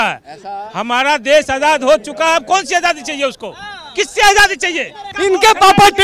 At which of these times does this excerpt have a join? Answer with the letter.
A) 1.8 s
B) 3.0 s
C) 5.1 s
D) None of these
C